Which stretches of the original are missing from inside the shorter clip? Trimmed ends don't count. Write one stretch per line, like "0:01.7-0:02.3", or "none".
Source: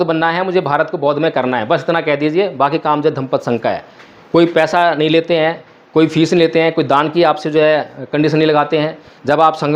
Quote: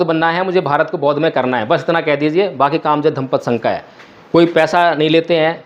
none